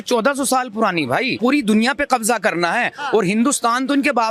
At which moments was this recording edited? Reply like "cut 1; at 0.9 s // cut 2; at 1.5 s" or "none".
cut 1; at 1.3 s